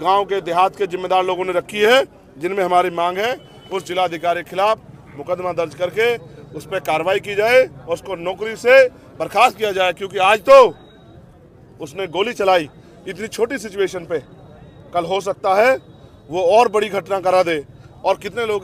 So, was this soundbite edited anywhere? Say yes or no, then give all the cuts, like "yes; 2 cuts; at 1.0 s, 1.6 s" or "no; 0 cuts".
no; 0 cuts